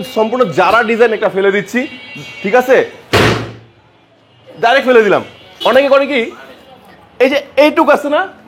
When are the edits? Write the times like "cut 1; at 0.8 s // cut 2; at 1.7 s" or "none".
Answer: cut 1; at 5.4 s